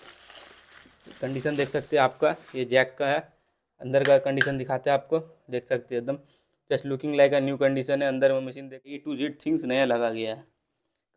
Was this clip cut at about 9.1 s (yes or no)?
yes